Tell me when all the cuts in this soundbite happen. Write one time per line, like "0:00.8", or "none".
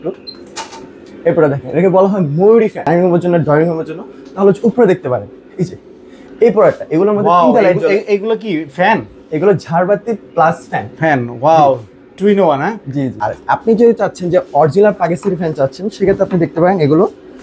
0:02.9
0:13.2